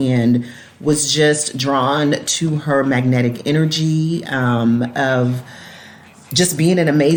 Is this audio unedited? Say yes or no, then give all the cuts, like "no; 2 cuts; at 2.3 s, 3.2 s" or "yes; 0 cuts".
yes; 0 cuts